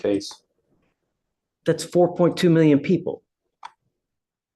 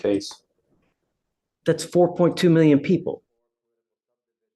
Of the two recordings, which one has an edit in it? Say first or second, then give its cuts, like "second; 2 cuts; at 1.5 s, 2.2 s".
first; 1 cut; at 3.4 s